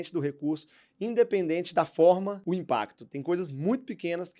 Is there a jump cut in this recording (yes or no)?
yes